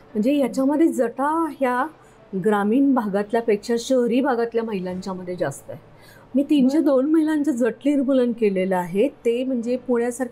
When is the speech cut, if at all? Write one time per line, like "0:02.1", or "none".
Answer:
none